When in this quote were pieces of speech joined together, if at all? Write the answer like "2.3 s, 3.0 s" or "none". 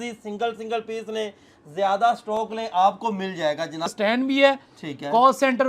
3.9 s